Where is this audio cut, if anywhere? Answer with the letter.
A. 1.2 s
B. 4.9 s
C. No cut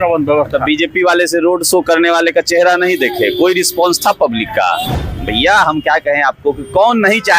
B